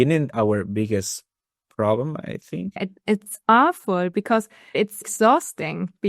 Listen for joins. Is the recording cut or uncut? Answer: cut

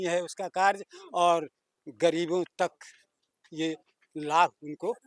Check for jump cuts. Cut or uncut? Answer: uncut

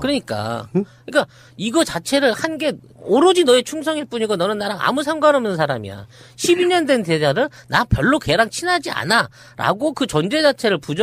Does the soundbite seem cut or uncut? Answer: cut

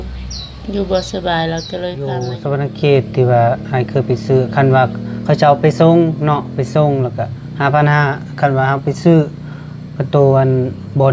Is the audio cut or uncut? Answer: cut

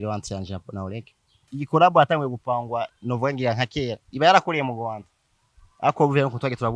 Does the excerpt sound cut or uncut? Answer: cut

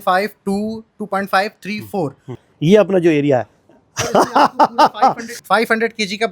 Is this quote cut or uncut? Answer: cut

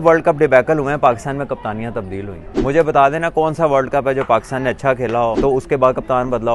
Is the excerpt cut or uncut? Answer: cut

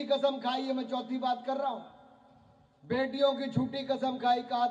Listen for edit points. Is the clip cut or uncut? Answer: uncut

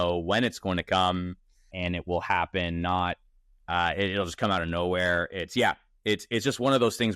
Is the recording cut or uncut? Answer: cut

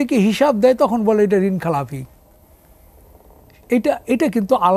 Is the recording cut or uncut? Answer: uncut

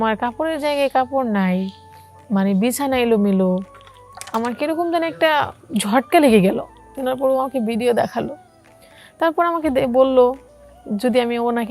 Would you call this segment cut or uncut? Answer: cut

